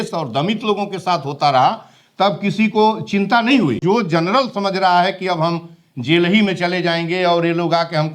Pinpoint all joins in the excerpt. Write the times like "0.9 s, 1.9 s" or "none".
3.8 s